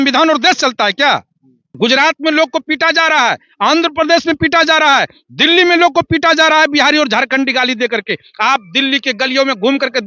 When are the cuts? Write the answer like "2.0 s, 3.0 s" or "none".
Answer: 1.6 s

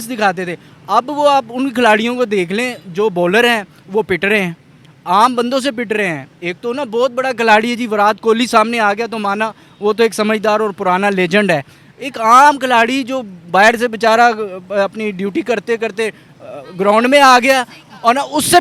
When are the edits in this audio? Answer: none

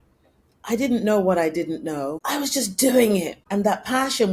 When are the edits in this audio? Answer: 2.2 s, 3.4 s

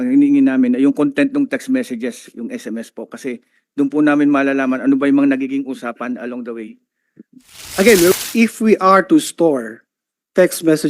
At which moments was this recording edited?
8.1 s

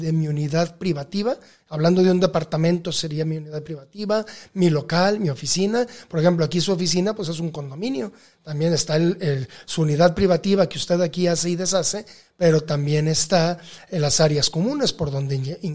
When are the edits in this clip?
none

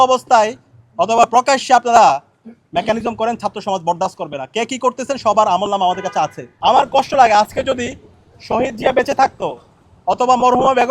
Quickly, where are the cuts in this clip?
6.4 s

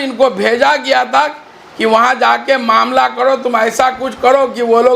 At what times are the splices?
none

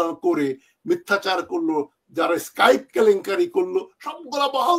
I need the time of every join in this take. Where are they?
none

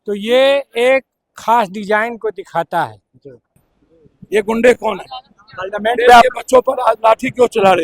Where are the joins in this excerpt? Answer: 3.7 s

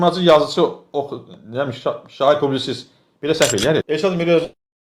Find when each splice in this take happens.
3.9 s

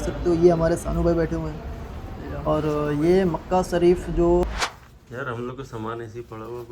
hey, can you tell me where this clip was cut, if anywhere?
4.5 s

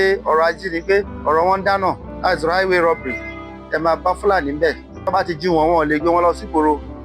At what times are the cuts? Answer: 1.1 s, 2.1 s, 4.9 s

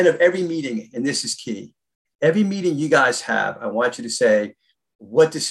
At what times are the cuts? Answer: none

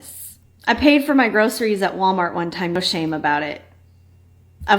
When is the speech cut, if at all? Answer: 2.8 s

